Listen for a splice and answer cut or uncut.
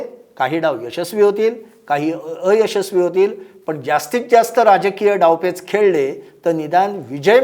uncut